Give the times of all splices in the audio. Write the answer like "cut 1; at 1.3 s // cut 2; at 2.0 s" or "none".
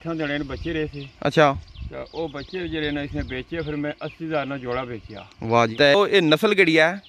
cut 1; at 5.7 s